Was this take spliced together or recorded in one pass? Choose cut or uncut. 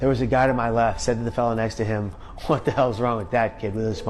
cut